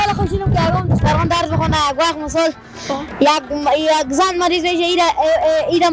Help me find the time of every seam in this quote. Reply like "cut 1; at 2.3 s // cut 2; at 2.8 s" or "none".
none